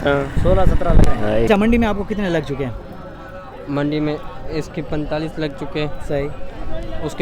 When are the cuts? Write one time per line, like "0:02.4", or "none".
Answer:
0:01.5